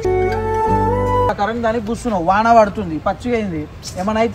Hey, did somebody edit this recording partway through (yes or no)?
yes